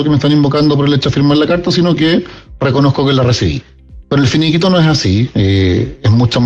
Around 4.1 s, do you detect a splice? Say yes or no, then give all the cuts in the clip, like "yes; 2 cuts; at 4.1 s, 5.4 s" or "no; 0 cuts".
no; 0 cuts